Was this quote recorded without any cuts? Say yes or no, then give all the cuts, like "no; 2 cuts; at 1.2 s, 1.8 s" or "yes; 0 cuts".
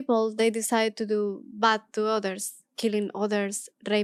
yes; 0 cuts